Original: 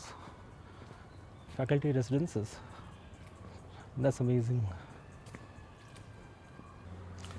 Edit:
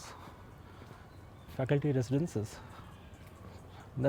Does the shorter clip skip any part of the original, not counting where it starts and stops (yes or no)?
no